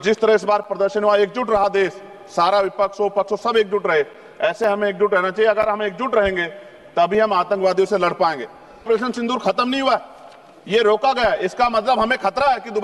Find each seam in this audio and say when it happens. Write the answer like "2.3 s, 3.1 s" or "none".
8.8 s

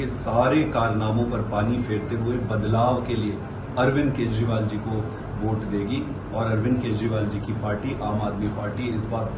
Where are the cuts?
none

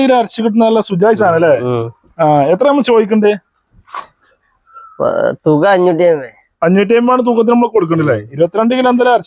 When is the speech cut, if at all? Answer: none

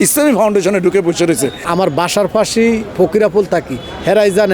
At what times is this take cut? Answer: 1.6 s

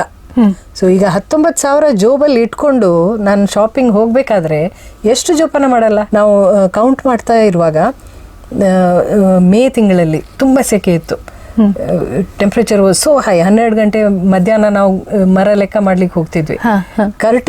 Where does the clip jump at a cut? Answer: 6.1 s

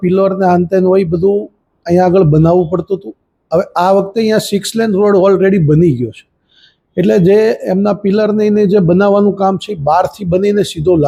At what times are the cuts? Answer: none

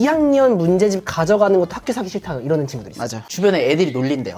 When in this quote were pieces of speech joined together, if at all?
3.3 s

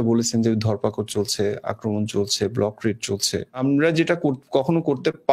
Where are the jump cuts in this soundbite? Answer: 3.6 s

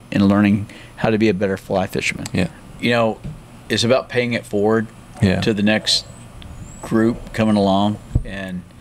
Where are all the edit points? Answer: 2.6 s

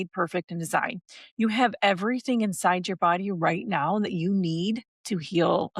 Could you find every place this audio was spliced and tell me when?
none

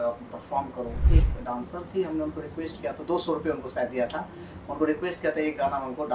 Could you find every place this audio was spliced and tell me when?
1.0 s

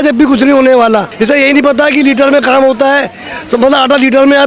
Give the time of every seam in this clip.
1.1 s

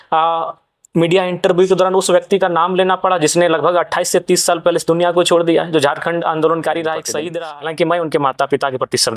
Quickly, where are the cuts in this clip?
7.2 s

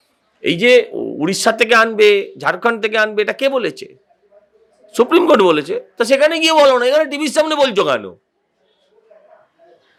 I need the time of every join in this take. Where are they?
none

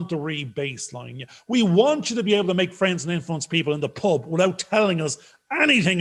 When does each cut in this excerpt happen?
none

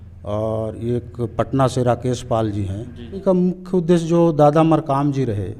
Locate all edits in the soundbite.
3.2 s

